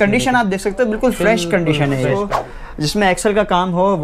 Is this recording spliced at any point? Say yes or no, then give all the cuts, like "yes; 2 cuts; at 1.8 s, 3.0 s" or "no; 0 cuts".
yes; 1 cut; at 2.3 s